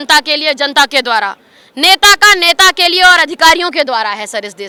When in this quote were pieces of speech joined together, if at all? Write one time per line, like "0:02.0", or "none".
none